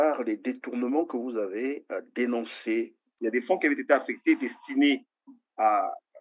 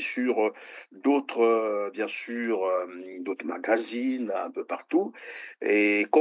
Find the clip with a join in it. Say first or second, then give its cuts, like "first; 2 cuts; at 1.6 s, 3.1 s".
first; 1 cut; at 3.1 s